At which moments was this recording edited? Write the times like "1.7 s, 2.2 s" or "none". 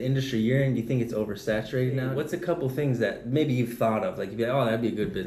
2.2 s